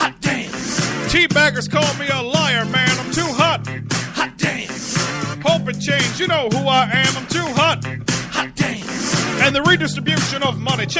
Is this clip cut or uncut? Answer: uncut